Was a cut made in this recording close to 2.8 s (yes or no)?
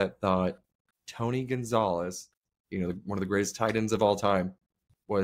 no